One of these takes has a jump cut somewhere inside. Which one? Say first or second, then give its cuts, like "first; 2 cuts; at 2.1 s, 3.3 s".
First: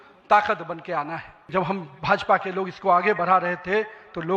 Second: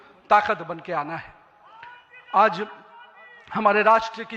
first; 1 cut; at 1.4 s